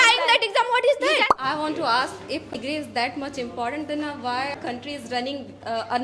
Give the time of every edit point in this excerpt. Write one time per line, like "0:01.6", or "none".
0:01.3
0:02.6
0:04.6